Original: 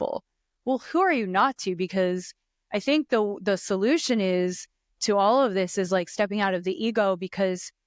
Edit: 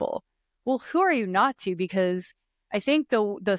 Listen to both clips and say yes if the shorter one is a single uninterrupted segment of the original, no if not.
yes